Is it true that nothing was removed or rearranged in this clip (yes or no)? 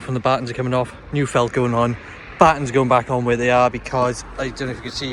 yes